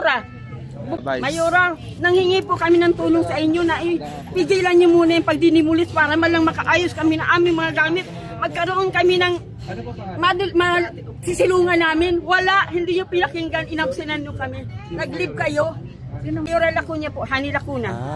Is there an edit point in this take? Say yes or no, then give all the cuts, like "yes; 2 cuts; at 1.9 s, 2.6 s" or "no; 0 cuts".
yes; 2 cuts; at 1.0 s, 16.5 s